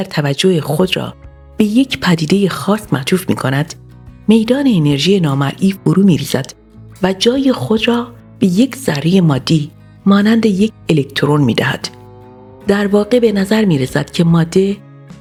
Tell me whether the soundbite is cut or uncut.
uncut